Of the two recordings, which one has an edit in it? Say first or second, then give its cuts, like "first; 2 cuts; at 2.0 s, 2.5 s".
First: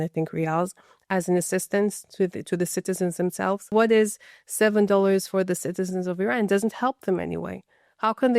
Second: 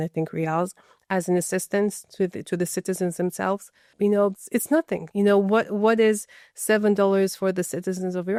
first; 1 cut; at 3.6 s